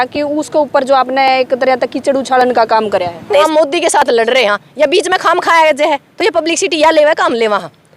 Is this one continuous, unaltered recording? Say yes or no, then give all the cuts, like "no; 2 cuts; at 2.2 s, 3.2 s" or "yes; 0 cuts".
no; 1 cut; at 3.5 s